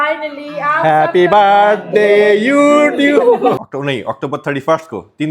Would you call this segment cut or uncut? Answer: cut